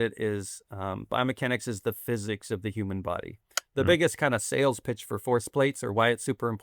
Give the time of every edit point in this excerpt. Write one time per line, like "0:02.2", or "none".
0:03.5